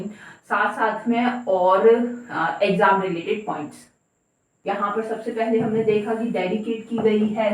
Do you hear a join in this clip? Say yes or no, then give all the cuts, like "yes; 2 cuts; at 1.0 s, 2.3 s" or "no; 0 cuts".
yes; 1 cut; at 4.5 s